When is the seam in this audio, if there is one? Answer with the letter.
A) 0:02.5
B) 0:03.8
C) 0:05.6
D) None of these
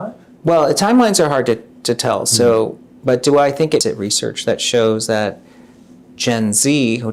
B